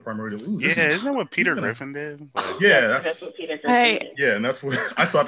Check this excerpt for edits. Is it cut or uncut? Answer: uncut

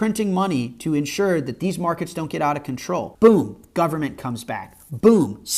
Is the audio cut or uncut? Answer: cut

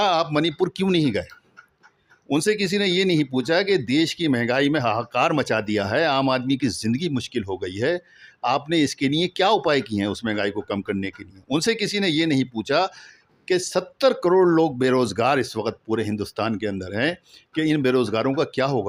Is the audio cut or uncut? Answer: uncut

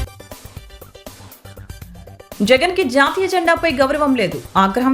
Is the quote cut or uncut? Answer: cut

